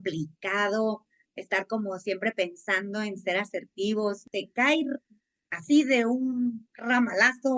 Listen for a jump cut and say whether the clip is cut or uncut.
cut